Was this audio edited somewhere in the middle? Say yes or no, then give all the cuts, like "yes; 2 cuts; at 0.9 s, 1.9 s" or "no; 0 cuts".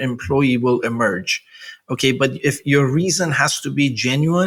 no; 0 cuts